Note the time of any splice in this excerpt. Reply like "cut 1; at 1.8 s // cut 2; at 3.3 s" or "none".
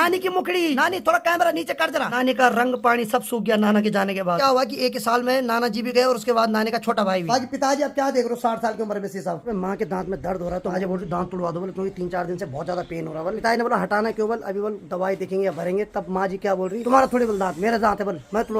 cut 1; at 0.8 s // cut 2; at 2.1 s // cut 3; at 4.4 s // cut 4; at 7.3 s // cut 5; at 9.5 s // cut 6; at 10.7 s // cut 7; at 13.4 s // cut 8; at 16.8 s